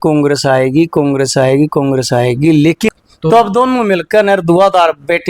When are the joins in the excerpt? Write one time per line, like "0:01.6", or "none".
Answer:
0:02.9